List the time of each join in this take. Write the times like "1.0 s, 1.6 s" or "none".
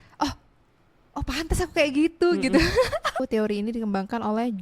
3.2 s